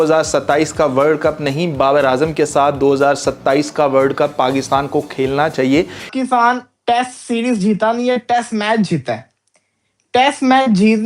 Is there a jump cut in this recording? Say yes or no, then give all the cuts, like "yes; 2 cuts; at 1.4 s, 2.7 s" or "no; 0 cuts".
yes; 1 cut; at 6.1 s